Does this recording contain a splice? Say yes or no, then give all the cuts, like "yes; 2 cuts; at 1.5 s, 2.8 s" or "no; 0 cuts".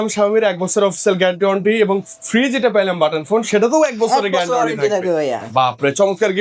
no; 0 cuts